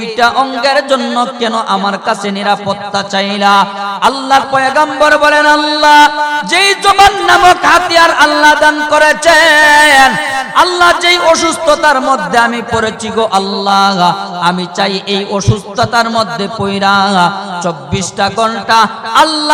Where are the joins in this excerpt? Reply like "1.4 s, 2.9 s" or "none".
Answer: none